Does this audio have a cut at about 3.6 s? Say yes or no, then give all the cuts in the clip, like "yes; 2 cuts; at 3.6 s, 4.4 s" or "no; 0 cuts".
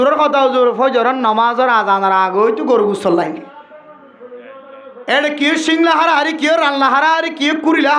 no; 0 cuts